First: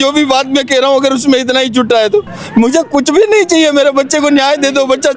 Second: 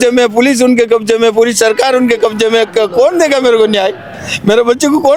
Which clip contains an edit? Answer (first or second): first